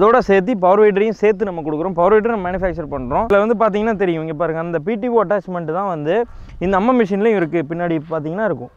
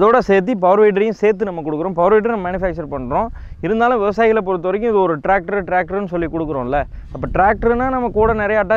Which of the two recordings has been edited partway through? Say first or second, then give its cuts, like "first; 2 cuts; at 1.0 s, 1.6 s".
first; 1 cut; at 3.3 s